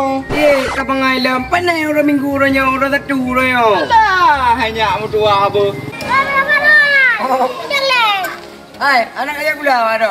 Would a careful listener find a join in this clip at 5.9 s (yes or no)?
yes